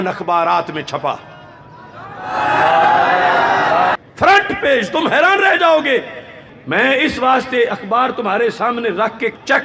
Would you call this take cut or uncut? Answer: cut